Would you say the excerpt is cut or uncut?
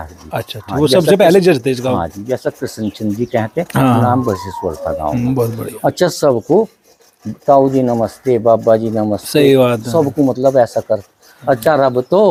uncut